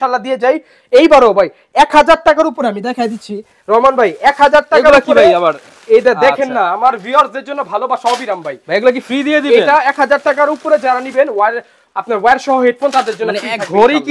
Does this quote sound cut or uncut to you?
uncut